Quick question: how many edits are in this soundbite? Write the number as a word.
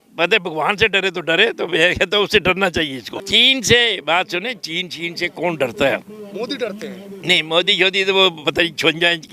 one